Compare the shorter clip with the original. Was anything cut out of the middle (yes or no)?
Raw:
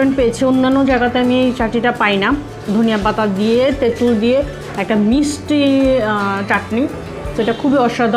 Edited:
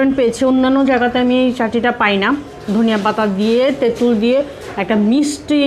no